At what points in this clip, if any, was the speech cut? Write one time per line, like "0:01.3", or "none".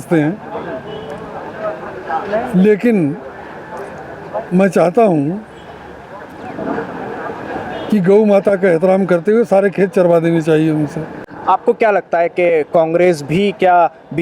none